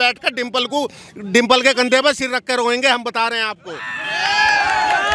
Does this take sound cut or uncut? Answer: uncut